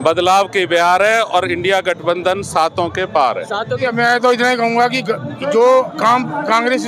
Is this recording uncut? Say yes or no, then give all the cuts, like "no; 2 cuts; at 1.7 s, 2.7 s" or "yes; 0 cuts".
no; 1 cut; at 3.9 s